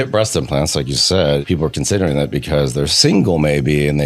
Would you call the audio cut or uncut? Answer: cut